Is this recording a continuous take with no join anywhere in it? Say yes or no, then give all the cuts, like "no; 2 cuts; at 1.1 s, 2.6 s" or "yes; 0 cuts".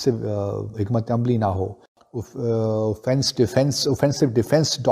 no; 1 cut; at 1.8 s